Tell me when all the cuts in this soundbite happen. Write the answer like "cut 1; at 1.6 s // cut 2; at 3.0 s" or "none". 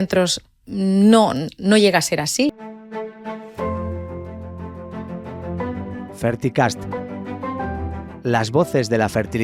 cut 1; at 2.5 s

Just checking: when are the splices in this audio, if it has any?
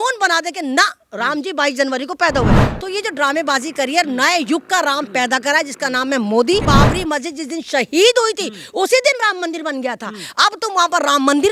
cut 1; at 2.6 s // cut 2; at 6.6 s

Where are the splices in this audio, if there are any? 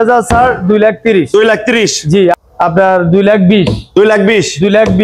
cut 1; at 2.3 s

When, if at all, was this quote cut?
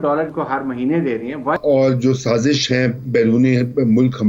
cut 1; at 1.6 s

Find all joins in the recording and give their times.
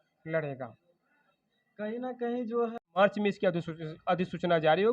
cut 1; at 2.7 s

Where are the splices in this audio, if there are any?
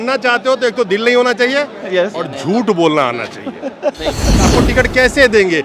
cut 1; at 4.4 s

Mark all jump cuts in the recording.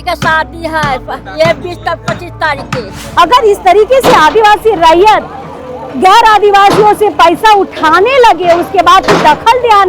cut 1; at 3.0 s

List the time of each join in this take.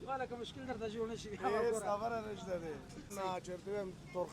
cut 1; at 3.1 s

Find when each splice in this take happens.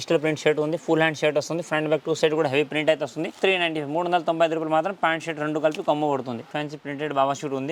cut 1; at 3.4 s // cut 2; at 6.5 s

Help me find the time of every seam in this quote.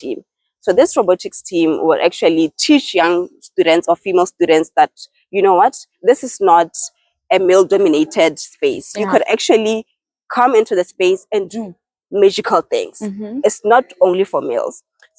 none

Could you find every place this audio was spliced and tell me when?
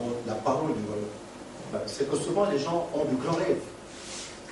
cut 1; at 1.7 s

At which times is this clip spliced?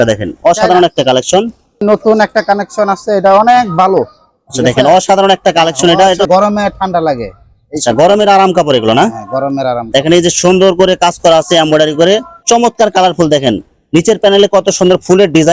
cut 1; at 1.7 s // cut 2; at 6.3 s // cut 3; at 12.3 s

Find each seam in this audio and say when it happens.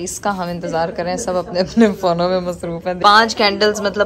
cut 1; at 3.0 s

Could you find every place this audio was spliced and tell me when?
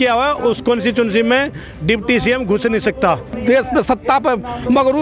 cut 1; at 3.3 s

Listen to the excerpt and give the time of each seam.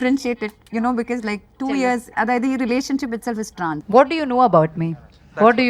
cut 1; at 3.8 s

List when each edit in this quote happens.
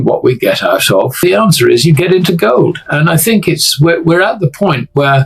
cut 1; at 1.1 s

